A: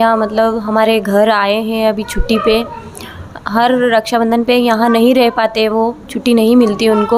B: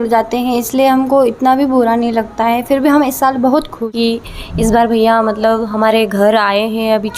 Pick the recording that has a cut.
B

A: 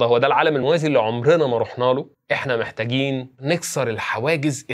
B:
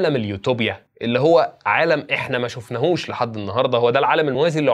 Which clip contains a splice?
A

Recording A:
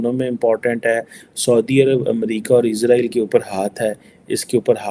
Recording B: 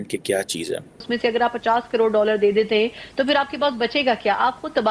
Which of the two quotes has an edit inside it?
B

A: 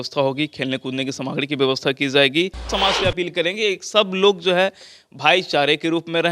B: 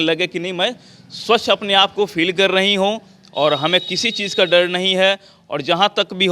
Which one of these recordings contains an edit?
A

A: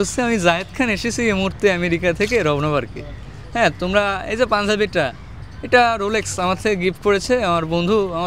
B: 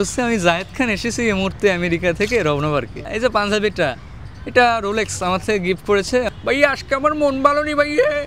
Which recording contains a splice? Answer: B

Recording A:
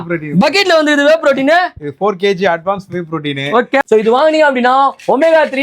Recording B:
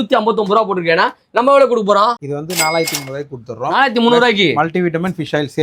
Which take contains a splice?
A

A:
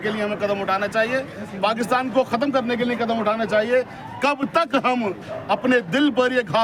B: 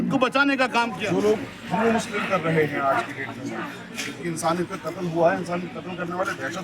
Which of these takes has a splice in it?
B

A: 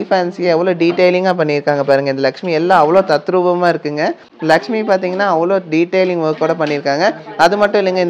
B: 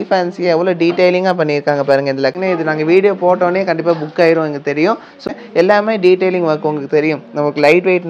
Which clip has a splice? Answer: B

